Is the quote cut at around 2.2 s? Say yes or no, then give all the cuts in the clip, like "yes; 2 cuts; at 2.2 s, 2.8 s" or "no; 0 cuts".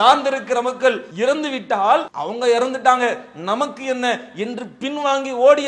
yes; 2 cuts; at 1.1 s, 2.2 s